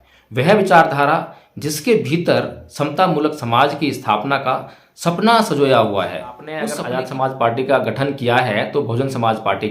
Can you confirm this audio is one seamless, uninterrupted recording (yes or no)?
no